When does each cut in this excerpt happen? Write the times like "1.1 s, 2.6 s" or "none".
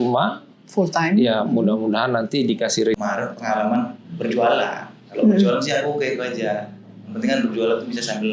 2.9 s